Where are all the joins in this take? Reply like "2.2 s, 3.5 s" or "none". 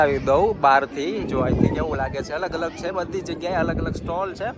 none